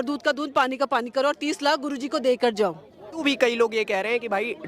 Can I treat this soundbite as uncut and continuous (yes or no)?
no